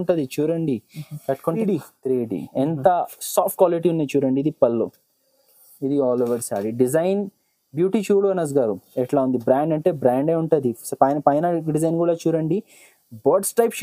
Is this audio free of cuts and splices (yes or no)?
no